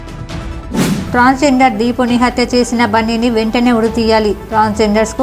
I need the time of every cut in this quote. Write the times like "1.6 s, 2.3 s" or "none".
1.0 s